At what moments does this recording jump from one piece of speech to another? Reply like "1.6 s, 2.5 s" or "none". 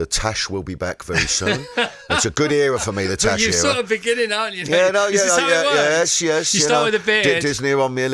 none